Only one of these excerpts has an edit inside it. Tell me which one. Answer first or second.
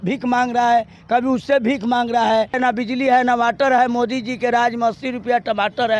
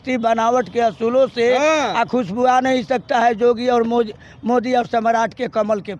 first